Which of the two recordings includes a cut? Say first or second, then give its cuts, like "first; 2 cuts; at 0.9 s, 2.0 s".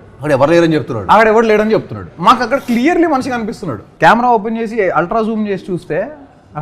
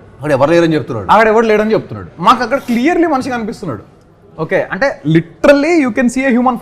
first; 1 cut; at 3.8 s